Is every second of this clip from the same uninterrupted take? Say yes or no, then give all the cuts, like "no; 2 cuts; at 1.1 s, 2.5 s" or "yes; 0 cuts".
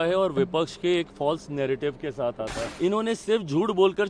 no; 1 cut; at 2.6 s